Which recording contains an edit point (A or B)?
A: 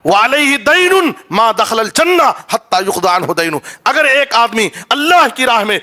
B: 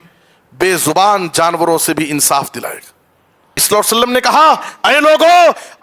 B